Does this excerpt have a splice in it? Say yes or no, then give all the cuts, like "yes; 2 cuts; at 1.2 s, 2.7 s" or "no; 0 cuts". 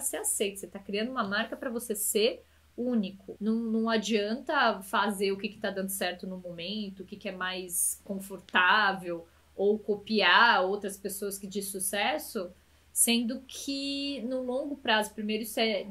yes; 1 cut; at 3.2 s